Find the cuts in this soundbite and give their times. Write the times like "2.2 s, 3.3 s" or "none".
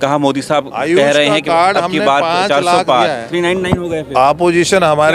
3.3 s